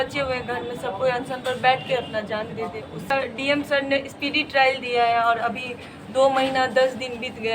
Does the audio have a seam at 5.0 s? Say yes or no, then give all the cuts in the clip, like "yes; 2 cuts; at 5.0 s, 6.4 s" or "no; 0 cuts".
no; 1 cut; at 3.1 s